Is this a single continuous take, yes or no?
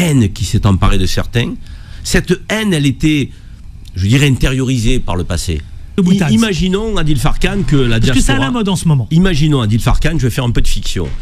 no